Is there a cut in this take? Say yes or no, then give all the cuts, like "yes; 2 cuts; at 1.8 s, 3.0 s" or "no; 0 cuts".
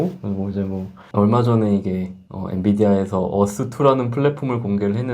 yes; 1 cut; at 1.0 s